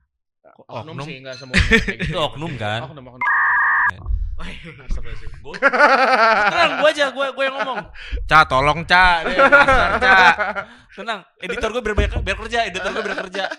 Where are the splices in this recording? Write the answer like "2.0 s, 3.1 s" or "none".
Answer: none